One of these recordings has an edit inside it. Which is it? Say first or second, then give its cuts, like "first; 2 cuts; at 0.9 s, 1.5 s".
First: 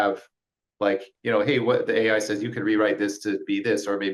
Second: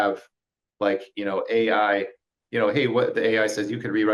first; 1 cut; at 1.1 s